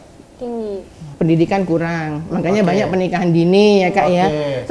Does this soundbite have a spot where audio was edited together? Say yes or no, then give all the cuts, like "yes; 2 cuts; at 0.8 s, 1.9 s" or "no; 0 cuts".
yes; 1 cut; at 1.1 s